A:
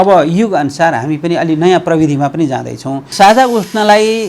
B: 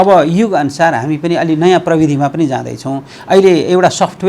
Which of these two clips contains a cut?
A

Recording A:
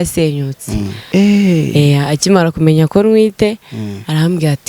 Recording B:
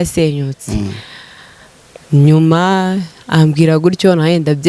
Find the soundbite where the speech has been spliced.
A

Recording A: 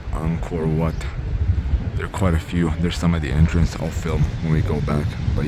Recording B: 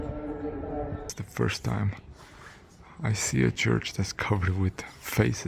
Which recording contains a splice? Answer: B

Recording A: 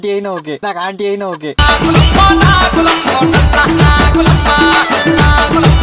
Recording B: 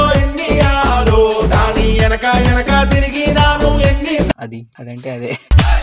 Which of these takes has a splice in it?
B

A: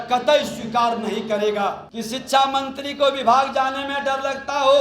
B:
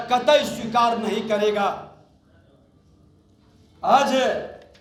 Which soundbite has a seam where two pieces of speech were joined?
A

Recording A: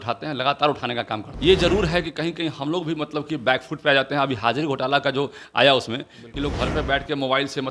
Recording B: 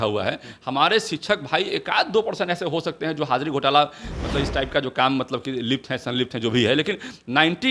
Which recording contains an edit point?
A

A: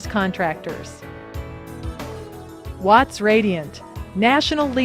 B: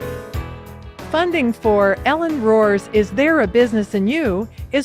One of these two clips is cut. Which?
A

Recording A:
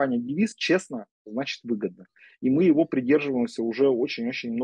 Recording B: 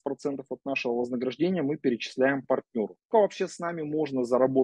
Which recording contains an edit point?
B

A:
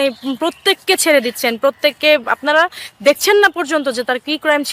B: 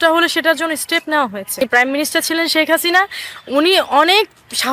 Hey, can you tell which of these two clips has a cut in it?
B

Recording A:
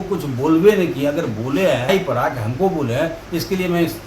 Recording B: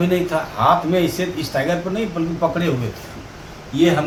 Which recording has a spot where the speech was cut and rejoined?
A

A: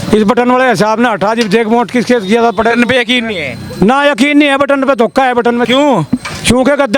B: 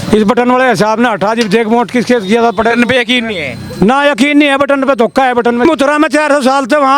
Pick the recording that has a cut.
B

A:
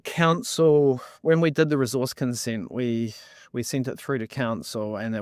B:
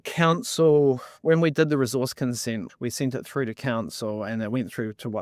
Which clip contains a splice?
B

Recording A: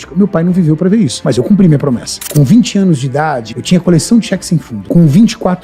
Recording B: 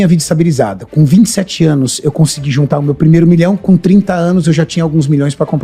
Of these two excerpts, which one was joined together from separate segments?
A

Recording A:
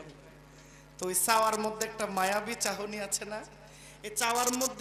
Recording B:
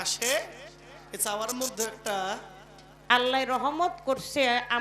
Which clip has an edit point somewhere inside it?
B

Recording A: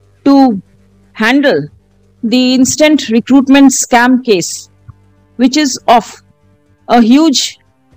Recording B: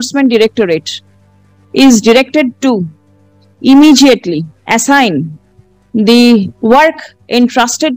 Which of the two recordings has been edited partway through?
B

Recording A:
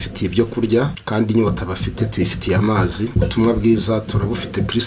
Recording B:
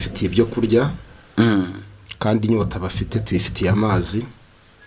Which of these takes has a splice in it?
A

